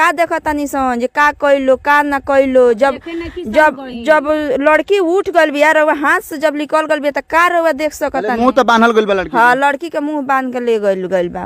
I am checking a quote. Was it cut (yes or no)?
no